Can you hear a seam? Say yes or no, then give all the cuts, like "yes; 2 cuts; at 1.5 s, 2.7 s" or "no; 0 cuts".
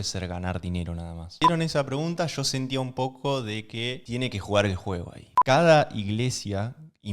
yes; 2 cuts; at 1.3 s, 5.3 s